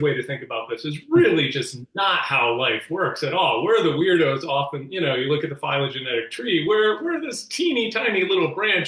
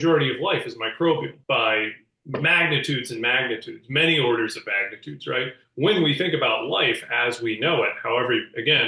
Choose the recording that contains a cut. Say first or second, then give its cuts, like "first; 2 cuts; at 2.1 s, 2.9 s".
second; 2 cuts; at 1.4 s, 5.6 s